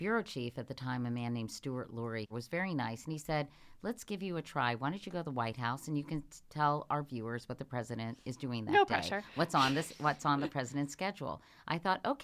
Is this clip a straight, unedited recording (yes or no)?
no